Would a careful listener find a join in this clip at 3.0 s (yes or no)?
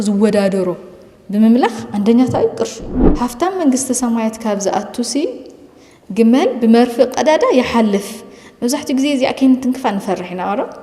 yes